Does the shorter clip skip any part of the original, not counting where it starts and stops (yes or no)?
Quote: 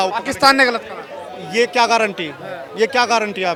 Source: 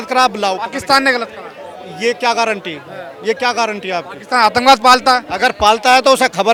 no